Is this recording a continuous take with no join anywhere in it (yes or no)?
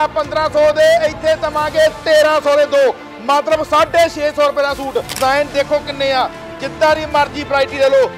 no